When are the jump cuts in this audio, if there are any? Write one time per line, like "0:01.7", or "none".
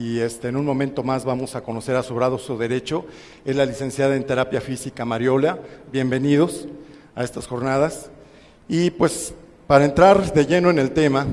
none